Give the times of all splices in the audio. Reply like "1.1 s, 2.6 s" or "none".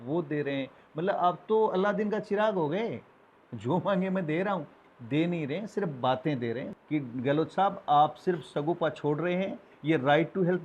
6.7 s